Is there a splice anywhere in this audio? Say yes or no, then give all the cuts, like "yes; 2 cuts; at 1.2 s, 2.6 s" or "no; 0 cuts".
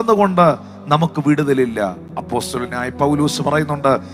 no; 0 cuts